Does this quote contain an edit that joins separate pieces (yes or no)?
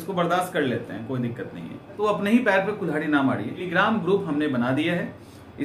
yes